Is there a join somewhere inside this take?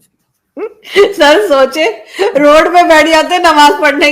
no; 0 cuts

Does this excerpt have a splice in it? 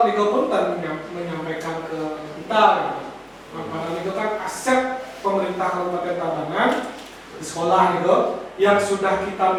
no; 0 cuts

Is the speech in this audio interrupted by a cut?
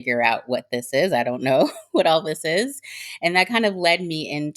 no; 0 cuts

